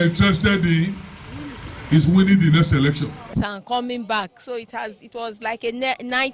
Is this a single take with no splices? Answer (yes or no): no